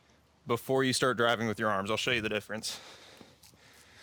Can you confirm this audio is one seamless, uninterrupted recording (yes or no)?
yes